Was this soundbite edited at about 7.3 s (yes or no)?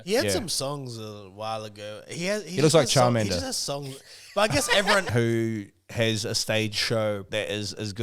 yes